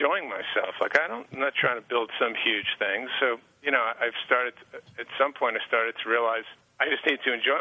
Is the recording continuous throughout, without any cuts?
no; 2 cuts; at 3.5 s, 6.6 s

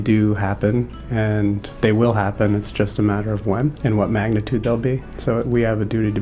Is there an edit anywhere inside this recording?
yes; 3 cuts; at 1.7 s, 3.8 s, 5.1 s

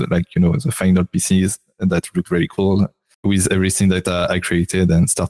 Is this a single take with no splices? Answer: no; 1 cut; at 3.1 s

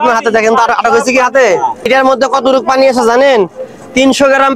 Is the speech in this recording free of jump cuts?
no; 1 cut; at 1.9 s

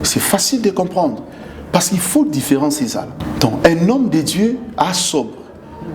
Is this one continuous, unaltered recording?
no; 1 cut; at 3.2 s

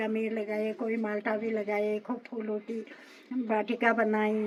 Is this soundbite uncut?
yes; 0 cuts

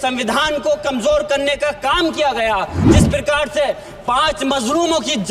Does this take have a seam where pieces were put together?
yes; 1 cut; at 2.9 s

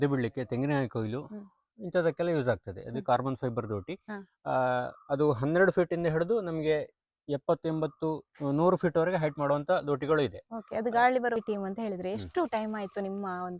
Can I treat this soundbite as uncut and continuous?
no; 1 cut; at 11.4 s

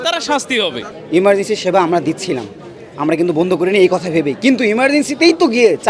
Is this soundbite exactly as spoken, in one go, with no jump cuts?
no; 1 cut; at 0.9 s

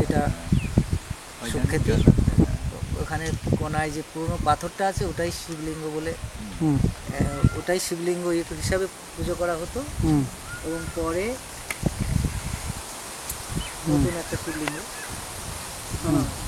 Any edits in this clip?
yes; 1 cut; at 2.5 s

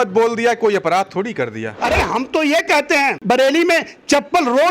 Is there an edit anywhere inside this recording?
yes; 2 cuts; at 1.7 s, 3.2 s

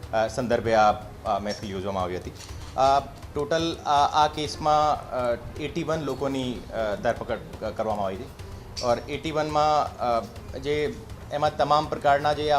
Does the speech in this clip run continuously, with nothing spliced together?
yes; 0 cuts

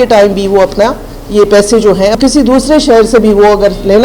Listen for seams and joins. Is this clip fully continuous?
no; 1 cut; at 2.2 s

